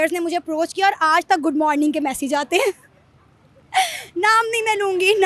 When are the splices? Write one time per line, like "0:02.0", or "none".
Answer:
none

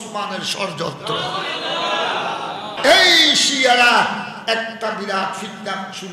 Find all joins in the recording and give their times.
0:02.7

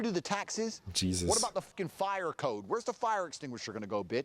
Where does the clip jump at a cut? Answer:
0:01.7

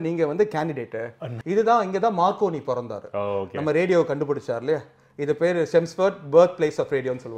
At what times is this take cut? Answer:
0:01.3

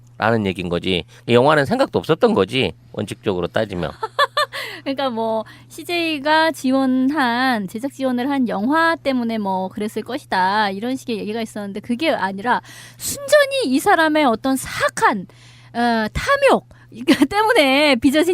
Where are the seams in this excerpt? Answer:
0:07.3

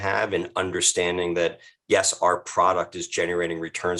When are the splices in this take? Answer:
none

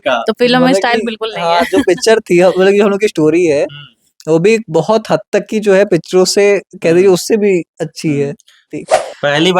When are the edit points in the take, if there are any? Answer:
0:08.7

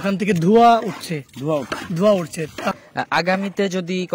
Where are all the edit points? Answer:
0:02.7

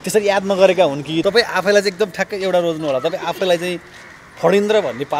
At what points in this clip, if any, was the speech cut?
0:01.2

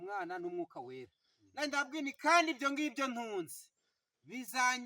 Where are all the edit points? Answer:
none

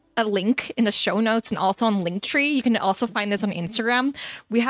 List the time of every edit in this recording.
none

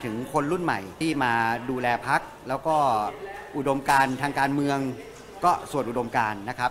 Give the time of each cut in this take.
0:00.9

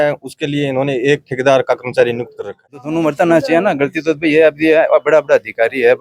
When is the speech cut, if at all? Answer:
0:02.8

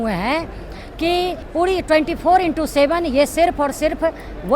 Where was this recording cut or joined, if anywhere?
0:01.4

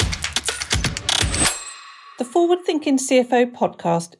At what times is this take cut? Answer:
0:02.0

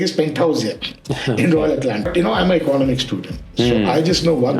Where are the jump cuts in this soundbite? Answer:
0:02.1

